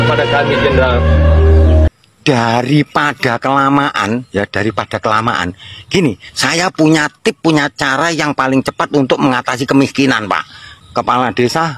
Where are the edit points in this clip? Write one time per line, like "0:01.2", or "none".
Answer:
0:01.9
0:10.7